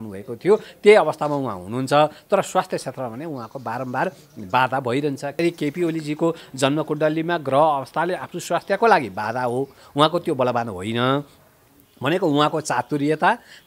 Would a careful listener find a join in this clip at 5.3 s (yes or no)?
yes